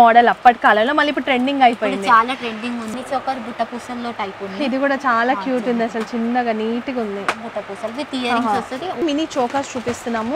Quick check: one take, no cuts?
no; 2 cuts; at 2.9 s, 9.0 s

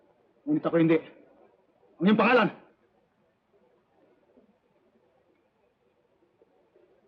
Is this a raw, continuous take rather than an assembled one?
yes; 0 cuts

